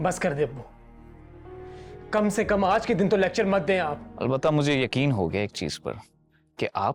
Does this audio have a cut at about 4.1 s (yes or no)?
yes